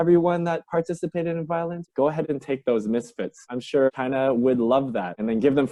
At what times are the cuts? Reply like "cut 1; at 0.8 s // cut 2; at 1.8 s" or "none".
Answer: none